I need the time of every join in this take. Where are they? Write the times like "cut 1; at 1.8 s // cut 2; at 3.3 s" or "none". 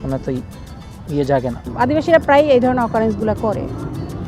cut 1; at 1.6 s